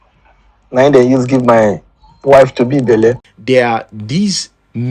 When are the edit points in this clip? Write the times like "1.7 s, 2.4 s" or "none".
3.3 s